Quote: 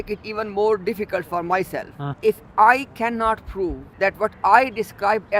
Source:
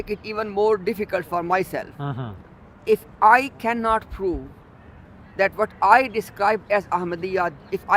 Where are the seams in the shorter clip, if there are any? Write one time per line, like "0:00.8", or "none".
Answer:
0:02.0
0:03.8